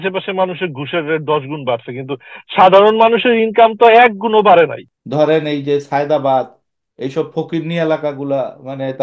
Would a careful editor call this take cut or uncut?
cut